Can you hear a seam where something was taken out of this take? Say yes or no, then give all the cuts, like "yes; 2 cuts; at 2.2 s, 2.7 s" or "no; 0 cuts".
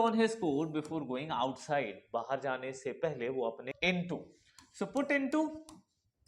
yes; 1 cut; at 3.7 s